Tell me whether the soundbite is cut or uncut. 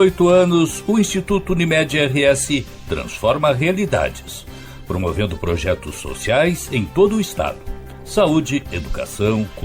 uncut